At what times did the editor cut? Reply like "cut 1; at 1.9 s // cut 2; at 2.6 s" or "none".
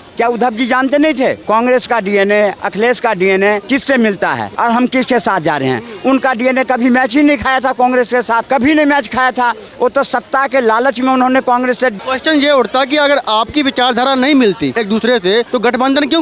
cut 1; at 1.4 s // cut 2; at 2.6 s // cut 3; at 3.6 s // cut 4; at 4.5 s // cut 5; at 8.4 s // cut 6; at 12.0 s // cut 7; at 14.7 s // cut 8; at 15.5 s